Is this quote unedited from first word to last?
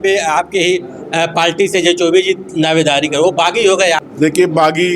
no; 1 cut; at 4.1 s

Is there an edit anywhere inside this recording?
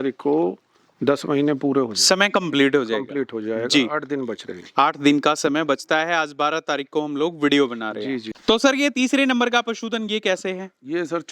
yes; 1 cut; at 8.3 s

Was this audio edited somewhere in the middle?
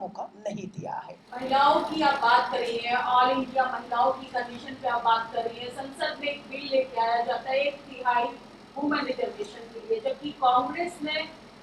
yes; 1 cut; at 1.2 s

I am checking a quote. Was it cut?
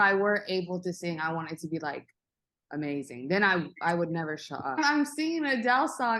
yes; 1 cut; at 4.9 s

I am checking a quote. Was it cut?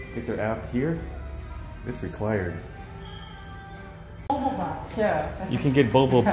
yes; 1 cut; at 4.2 s

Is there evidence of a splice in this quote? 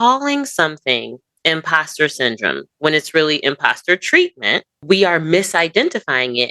yes; 1 cut; at 4.7 s

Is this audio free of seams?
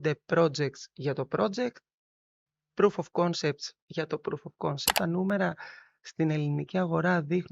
no; 1 cut; at 4.9 s

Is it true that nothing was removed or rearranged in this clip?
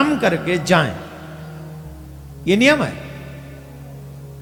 yes; 0 cuts

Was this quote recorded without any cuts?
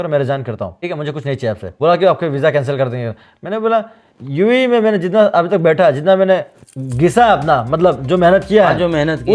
no; 2 cuts; at 0.8 s, 1.7 s

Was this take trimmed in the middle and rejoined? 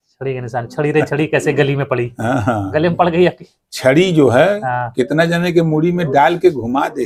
no; 0 cuts

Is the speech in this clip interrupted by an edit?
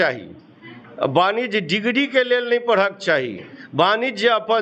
no; 0 cuts

